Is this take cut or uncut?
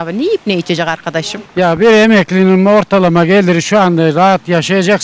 cut